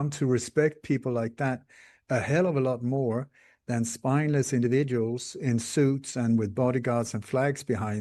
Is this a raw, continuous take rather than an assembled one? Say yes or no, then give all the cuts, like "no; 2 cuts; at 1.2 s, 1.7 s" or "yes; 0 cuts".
yes; 0 cuts